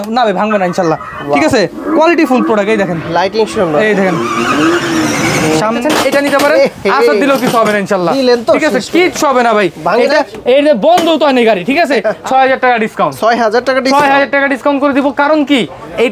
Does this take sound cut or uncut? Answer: cut